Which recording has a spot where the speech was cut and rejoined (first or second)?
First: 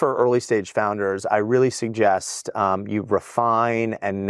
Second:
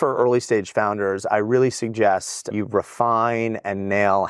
second